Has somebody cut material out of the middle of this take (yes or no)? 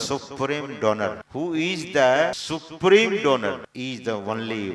yes